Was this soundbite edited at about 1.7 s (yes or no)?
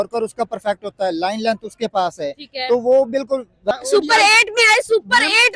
no